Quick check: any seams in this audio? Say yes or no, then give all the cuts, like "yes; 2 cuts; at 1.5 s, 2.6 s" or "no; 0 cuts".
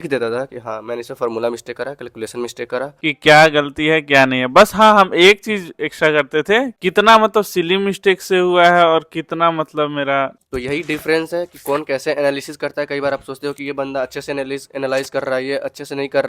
yes; 3 cuts; at 3.1 s, 6.7 s, 10.4 s